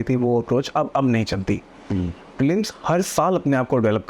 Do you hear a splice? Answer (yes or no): no